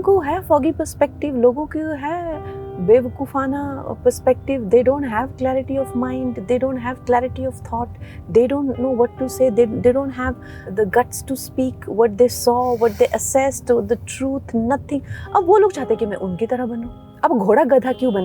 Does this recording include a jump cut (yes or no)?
yes